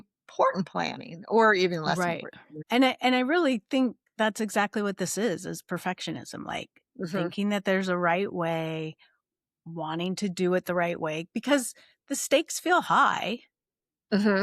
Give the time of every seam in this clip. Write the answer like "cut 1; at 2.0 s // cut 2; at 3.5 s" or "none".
cut 1; at 2.6 s